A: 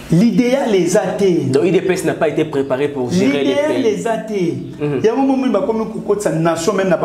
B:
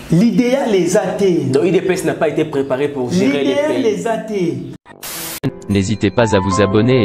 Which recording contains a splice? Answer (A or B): B